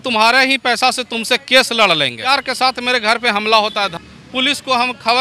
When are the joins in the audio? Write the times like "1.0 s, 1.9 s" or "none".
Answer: 2.3 s, 3.9 s